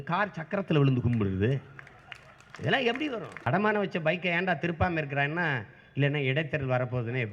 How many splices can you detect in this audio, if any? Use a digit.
1